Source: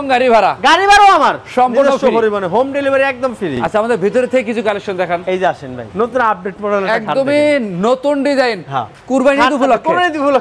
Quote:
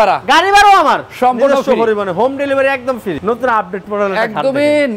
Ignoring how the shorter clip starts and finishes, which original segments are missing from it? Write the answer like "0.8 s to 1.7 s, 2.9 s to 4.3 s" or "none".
3.5 s to 5.9 s